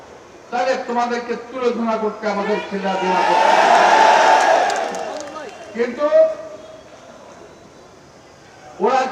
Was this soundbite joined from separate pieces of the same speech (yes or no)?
no